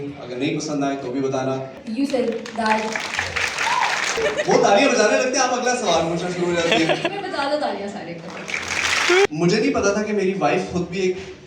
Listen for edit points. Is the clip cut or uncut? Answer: cut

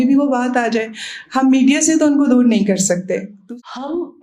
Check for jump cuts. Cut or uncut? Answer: cut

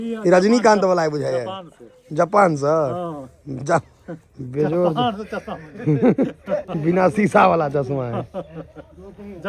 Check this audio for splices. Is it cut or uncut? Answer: uncut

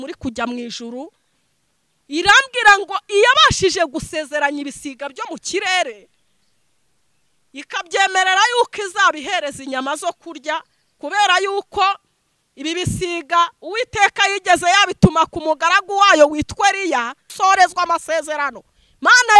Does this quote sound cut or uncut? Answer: cut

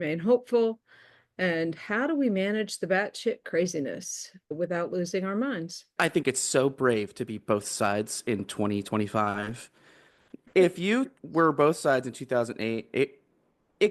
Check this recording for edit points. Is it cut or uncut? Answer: cut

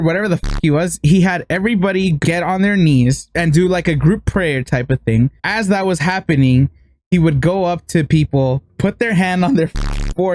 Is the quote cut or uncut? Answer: cut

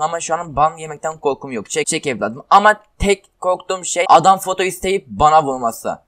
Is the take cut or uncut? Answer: cut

